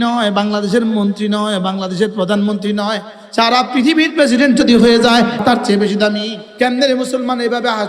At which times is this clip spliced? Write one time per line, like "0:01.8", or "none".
0:05.4
0:06.4